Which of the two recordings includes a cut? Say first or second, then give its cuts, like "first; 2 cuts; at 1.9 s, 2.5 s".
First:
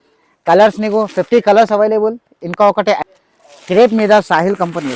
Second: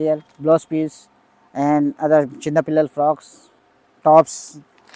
first; 1 cut; at 3.0 s